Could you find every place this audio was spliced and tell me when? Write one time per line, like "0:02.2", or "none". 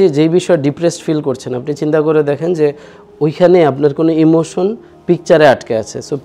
none